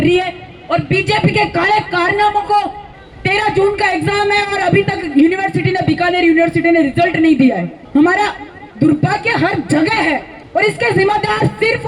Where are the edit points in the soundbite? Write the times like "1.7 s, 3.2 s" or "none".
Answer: 2.8 s, 7.7 s, 10.3 s